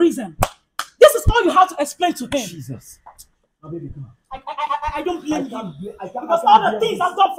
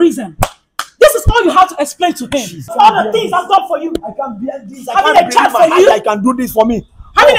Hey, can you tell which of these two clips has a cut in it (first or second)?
second